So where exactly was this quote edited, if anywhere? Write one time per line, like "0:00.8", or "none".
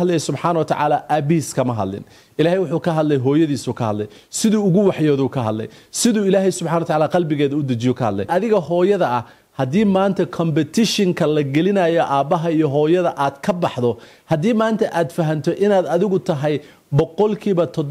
0:08.3